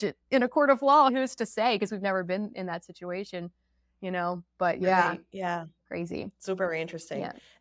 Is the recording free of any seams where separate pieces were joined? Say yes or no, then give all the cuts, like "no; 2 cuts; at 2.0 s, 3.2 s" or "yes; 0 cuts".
no; 1 cut; at 1.1 s